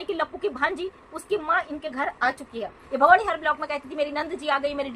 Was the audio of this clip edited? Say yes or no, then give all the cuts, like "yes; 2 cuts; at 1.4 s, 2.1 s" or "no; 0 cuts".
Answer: yes; 1 cut; at 2.8 s